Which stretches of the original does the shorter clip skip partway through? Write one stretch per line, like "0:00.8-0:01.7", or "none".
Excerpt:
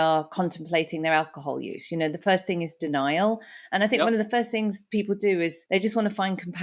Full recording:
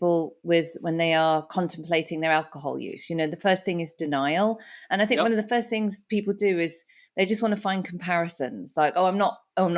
0:06.8-0:07.1